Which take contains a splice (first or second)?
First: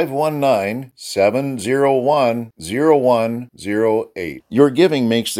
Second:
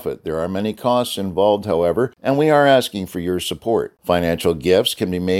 second